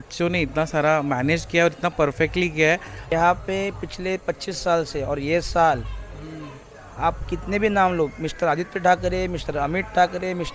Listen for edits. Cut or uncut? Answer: cut